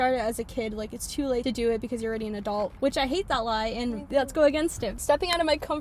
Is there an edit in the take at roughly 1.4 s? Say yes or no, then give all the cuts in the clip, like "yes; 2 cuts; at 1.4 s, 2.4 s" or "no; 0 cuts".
yes; 4 cuts; at 1.4 s, 2.7 s, 4.0 s, 5.0 s